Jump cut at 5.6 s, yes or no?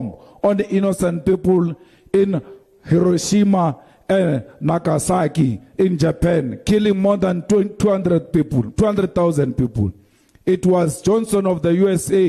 no